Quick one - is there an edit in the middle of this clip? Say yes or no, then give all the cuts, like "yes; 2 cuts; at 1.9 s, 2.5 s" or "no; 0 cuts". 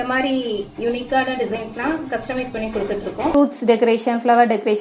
yes; 1 cut; at 3.3 s